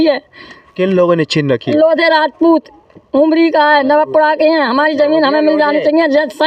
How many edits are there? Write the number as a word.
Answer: zero